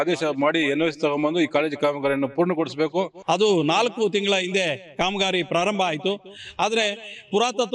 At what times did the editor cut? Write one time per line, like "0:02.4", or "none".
0:03.2